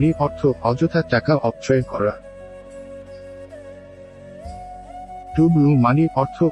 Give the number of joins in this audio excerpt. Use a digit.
2